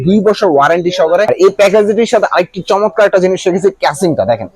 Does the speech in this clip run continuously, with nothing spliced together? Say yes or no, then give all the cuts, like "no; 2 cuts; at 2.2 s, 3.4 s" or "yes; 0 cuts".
no; 1 cut; at 1.3 s